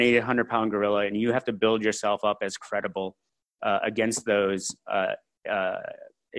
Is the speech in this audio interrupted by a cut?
no; 0 cuts

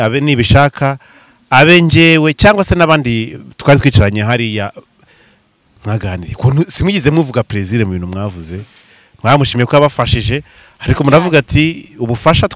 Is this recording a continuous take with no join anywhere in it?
yes; 0 cuts

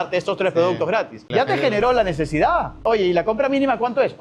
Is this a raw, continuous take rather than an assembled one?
no; 2 cuts; at 1.2 s, 2.8 s

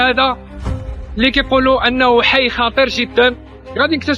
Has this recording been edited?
no; 0 cuts

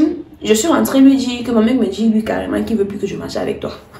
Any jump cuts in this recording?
no; 0 cuts

